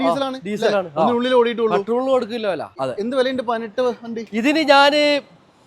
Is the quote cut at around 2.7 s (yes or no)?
yes